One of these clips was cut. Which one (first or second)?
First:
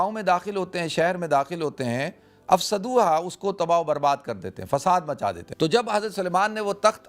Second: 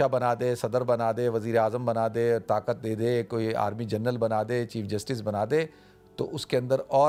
first